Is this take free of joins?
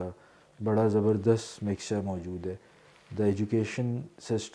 yes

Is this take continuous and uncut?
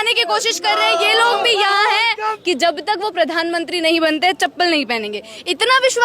no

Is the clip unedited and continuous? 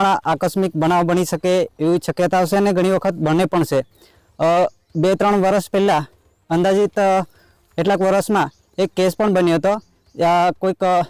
yes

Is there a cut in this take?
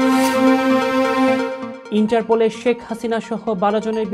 yes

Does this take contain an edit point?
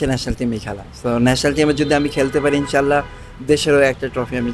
no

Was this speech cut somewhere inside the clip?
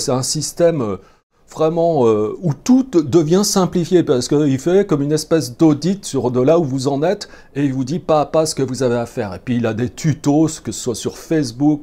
no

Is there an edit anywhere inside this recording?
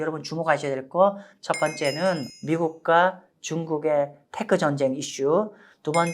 yes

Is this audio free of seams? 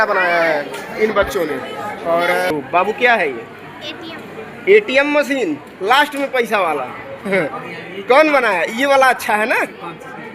no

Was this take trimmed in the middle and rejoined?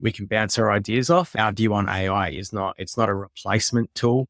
yes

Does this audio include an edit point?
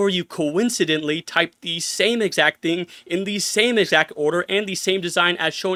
no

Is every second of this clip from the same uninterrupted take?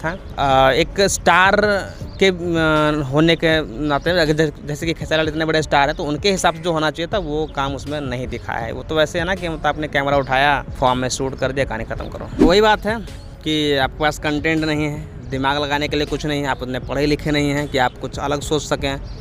no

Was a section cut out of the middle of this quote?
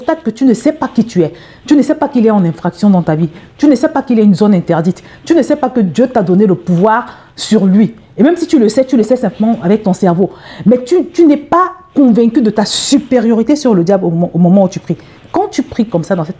no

